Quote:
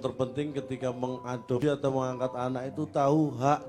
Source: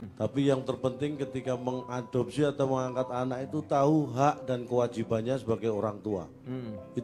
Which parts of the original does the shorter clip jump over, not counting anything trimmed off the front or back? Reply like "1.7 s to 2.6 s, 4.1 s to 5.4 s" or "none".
2.2 s to 2.4 s